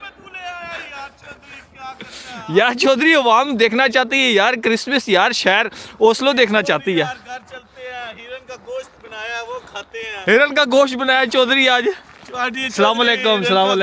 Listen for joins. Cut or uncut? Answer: uncut